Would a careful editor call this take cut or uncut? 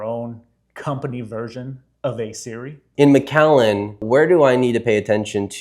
cut